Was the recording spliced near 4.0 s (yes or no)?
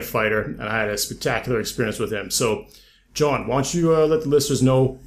no